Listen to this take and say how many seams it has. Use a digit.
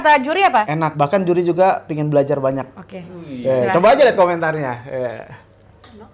0